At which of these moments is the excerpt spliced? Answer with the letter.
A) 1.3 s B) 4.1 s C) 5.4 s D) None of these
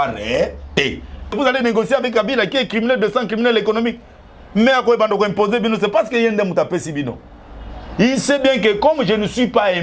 A